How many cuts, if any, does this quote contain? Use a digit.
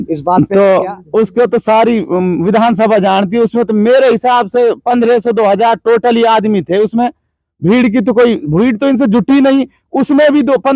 0